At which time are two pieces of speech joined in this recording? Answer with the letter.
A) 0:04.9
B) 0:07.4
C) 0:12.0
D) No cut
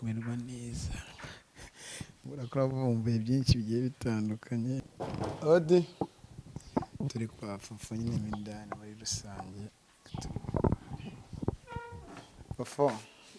A